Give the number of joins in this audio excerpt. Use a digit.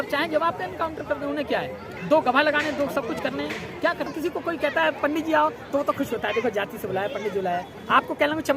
1